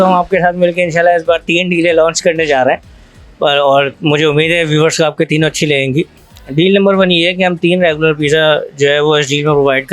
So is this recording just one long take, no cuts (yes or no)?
no